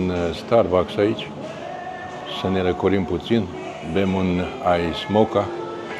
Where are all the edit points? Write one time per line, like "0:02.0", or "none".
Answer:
none

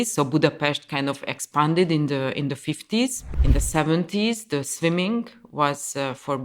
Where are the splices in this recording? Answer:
0:03.3

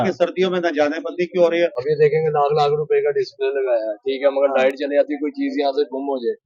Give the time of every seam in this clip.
0:01.8

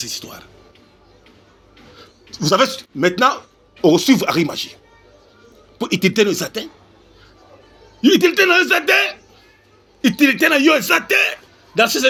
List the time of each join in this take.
none

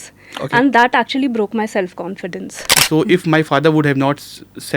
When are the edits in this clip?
0:02.7

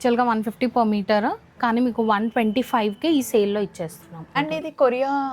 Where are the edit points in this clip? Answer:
0:04.3

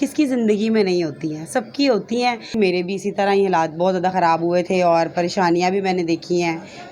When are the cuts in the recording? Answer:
0:02.5

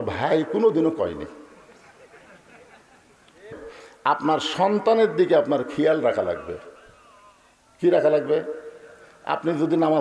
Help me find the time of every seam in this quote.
0:03.5

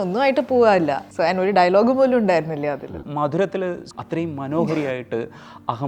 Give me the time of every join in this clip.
0:01.0
0:03.0
0:03.8

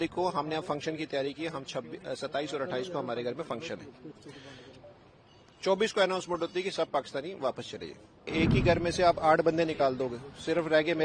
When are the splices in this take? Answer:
0:08.3

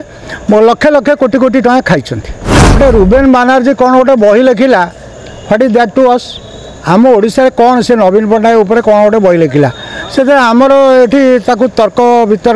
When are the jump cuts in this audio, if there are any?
0:02.8

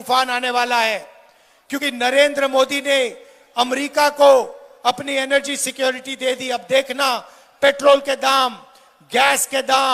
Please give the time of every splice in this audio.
none

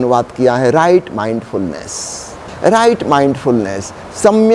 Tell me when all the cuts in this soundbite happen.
0:02.4

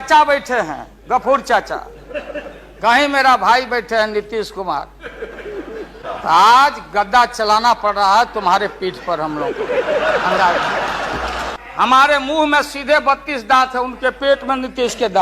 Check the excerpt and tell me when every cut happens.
0:06.0
0:11.5

